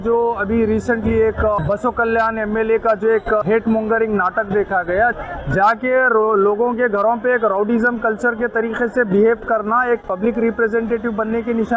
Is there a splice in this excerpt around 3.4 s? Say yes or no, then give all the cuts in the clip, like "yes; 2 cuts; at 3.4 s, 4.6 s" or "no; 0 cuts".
yes; 3 cuts; at 1.6 s, 3.4 s, 5.1 s